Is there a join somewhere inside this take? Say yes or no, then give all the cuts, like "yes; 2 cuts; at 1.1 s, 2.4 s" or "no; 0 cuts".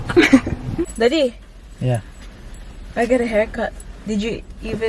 yes; 1 cut; at 0.9 s